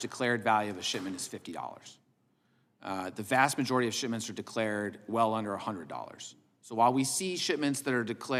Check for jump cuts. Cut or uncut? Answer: uncut